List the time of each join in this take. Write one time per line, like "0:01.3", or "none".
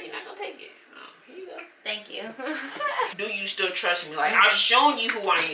0:03.1